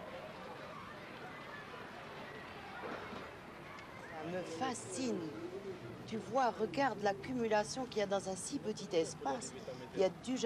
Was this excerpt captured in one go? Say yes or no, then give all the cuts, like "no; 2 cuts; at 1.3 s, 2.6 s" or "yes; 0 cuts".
no; 1 cut; at 8.2 s